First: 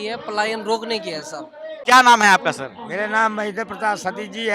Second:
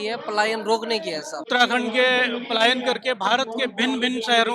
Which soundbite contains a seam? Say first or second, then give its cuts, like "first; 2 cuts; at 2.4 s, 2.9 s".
second; 1 cut; at 1.5 s